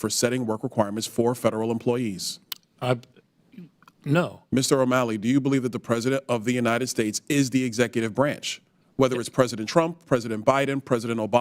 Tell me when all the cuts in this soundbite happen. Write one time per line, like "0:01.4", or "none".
0:04.4